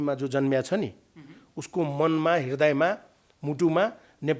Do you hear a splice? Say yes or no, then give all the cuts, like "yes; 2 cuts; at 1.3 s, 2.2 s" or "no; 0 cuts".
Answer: no; 0 cuts